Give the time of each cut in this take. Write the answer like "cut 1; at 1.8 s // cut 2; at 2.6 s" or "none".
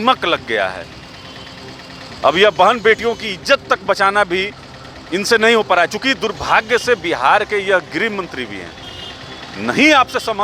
none